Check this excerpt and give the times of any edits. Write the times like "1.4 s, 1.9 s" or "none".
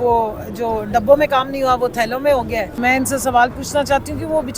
2.8 s